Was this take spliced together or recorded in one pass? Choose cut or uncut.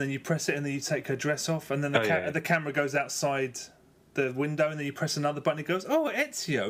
uncut